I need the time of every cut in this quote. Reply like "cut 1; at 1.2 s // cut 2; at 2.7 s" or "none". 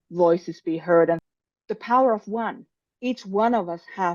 cut 1; at 1.2 s